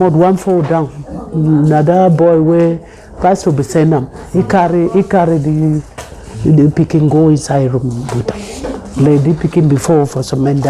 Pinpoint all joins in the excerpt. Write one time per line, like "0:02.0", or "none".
none